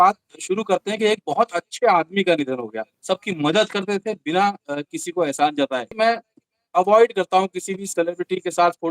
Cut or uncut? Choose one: cut